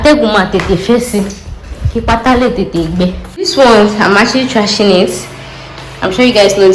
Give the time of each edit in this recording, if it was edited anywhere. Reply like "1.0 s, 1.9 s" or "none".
3.5 s